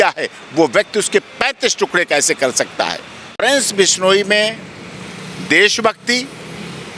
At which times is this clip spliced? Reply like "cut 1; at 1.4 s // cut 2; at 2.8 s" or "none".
cut 1; at 3.4 s